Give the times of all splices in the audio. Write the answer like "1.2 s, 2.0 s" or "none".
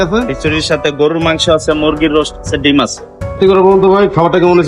3.4 s